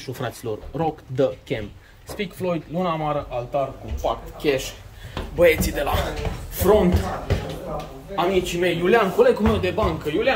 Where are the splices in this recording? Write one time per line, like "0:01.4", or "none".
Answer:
none